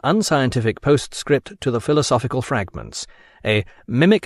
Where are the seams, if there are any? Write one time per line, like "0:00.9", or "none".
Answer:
none